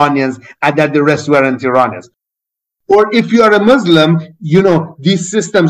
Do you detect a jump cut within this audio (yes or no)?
yes